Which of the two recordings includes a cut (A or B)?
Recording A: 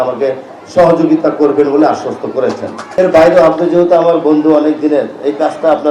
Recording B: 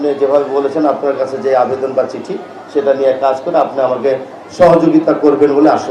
A